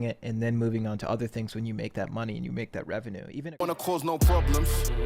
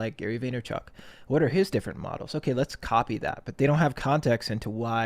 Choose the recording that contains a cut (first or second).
first